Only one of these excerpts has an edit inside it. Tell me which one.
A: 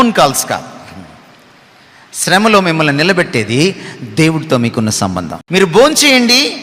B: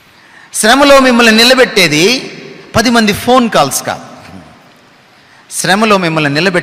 A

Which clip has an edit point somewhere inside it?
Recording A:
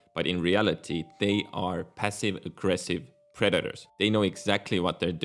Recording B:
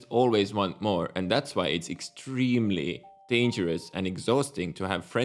A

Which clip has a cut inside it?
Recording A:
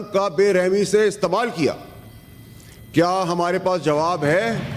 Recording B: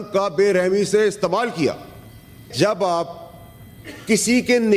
B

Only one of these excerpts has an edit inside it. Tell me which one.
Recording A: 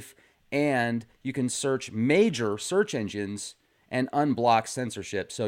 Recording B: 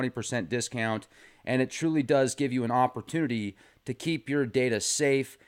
A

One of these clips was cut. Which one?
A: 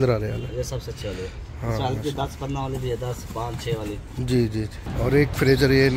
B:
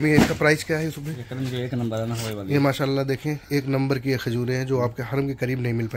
A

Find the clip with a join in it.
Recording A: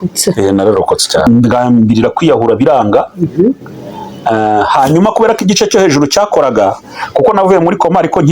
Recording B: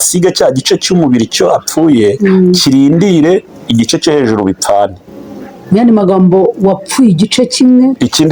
A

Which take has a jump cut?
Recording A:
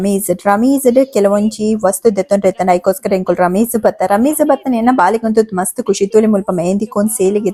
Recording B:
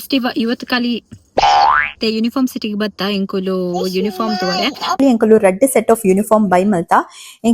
B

